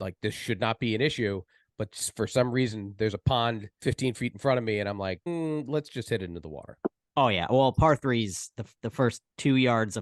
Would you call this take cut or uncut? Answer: cut